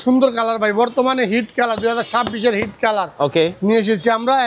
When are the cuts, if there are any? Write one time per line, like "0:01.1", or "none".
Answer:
none